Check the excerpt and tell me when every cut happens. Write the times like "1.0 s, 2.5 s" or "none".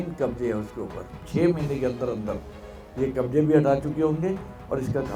1.2 s